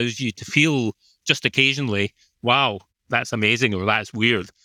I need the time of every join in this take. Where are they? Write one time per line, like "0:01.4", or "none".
0:02.8